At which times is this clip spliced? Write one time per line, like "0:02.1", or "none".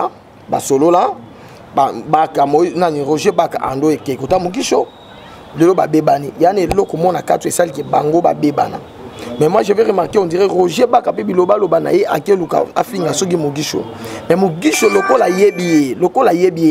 none